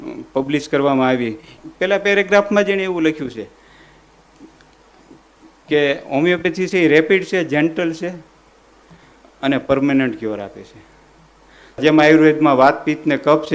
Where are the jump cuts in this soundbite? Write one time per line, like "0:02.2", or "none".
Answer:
0:01.5
0:11.8